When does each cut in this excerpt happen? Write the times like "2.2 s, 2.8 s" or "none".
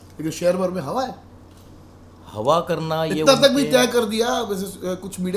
none